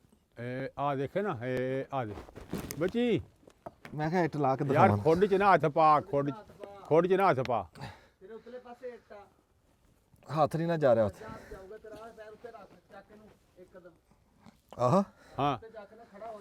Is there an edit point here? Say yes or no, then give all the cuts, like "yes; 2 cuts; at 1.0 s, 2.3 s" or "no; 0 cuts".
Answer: no; 0 cuts